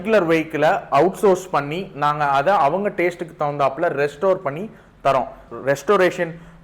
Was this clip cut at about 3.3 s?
no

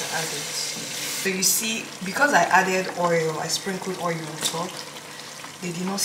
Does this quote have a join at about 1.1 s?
yes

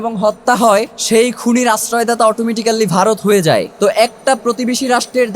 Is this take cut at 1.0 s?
yes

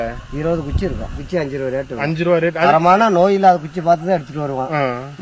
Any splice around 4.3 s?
no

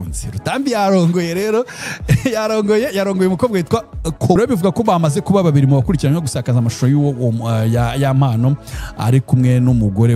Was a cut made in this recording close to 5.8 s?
no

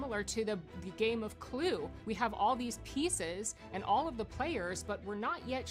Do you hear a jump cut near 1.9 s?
yes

